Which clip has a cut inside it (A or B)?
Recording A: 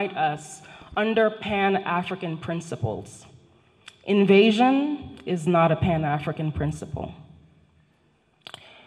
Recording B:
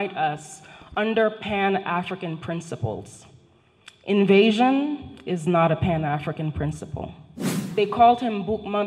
B